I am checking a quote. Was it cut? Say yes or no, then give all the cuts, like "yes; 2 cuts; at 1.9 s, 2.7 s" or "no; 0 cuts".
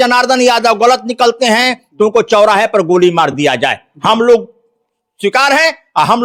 no; 0 cuts